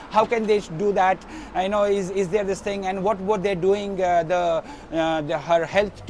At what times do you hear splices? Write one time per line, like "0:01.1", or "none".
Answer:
none